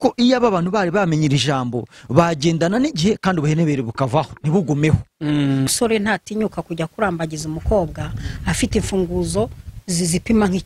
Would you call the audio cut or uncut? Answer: cut